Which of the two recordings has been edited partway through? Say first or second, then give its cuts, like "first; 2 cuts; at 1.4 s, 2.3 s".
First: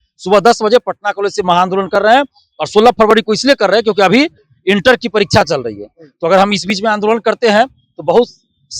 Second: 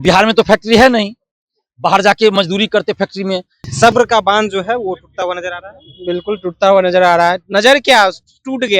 second; 1 cut; at 3.5 s